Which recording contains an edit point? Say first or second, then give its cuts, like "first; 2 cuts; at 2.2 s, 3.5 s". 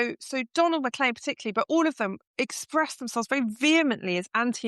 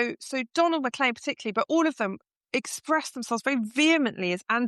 first; 1 cut; at 2.2 s